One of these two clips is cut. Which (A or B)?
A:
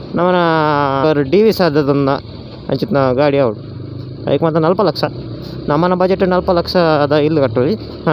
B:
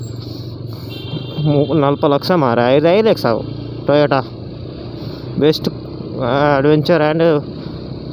A